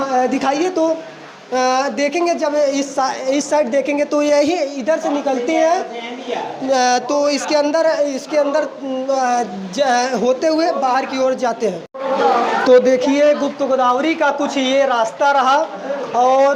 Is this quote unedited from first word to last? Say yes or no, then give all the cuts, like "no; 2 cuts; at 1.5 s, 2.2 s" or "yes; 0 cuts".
yes; 0 cuts